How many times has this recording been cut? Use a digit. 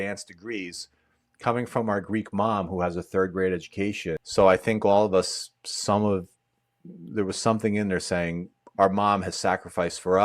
1